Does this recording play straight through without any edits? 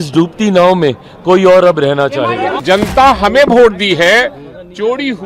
no; 1 cut; at 2.6 s

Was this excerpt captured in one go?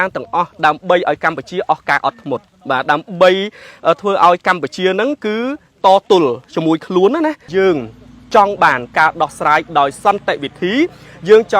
no; 1 cut; at 7.5 s

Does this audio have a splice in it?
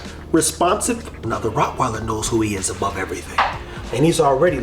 yes; 2 cuts; at 1.2 s, 3.7 s

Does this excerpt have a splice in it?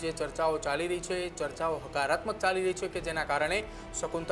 no; 0 cuts

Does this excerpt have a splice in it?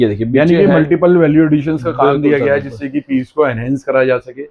no; 0 cuts

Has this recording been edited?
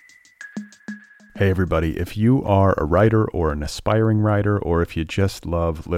yes; 1 cut; at 1.1 s

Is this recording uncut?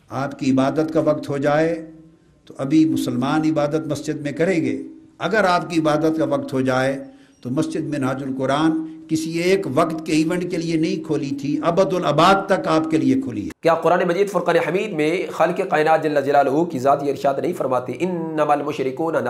no; 1 cut; at 13.4 s

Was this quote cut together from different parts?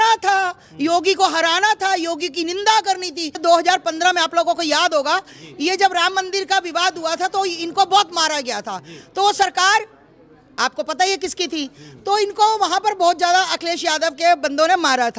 yes; 1 cut; at 3.4 s

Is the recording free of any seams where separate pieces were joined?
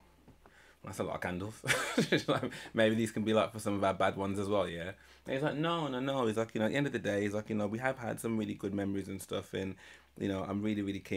yes; 0 cuts

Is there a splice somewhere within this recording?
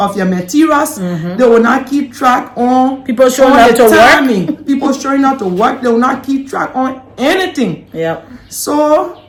no; 0 cuts

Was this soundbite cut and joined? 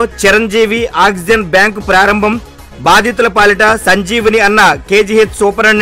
no; 0 cuts

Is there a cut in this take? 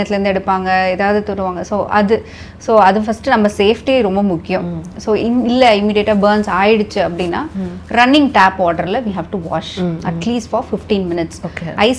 no; 0 cuts

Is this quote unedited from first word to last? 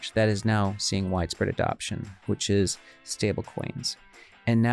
yes; 0 cuts

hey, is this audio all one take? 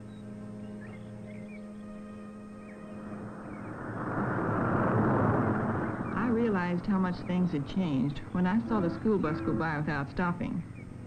yes; 0 cuts

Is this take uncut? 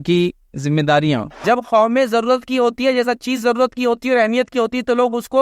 no; 1 cut; at 1.3 s

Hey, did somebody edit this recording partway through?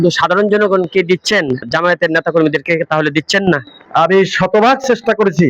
yes; 2 cuts; at 1.7 s, 3.8 s

